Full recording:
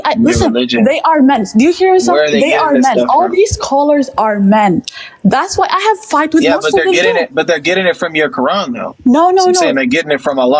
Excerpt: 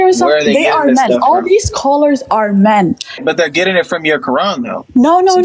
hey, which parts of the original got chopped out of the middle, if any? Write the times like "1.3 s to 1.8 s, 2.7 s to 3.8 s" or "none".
5.1 s to 7.3 s